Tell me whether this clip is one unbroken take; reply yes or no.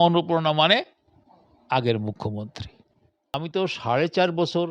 no